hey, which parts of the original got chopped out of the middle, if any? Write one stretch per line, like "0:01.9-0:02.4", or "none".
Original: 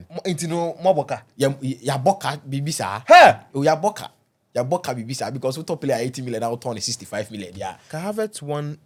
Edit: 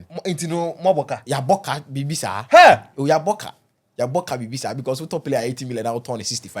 0:01.2-0:01.8